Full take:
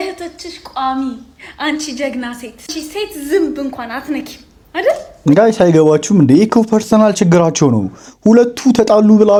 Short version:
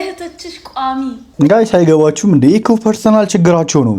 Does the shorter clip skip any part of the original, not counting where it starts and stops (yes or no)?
yes